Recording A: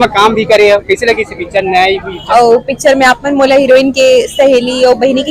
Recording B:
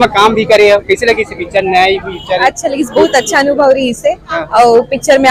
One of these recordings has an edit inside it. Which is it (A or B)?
A